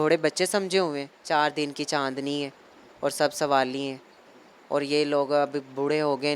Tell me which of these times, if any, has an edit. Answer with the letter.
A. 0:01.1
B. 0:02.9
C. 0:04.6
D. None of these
A